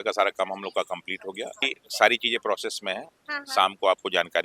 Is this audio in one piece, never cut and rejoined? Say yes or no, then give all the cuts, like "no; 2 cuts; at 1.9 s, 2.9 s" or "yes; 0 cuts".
no; 1 cut; at 1.5 s